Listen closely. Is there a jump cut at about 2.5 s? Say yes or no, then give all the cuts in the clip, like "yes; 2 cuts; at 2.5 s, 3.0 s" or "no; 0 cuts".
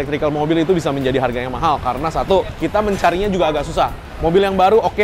no; 0 cuts